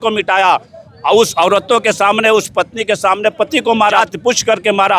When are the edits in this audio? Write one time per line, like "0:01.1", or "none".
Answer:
0:03.9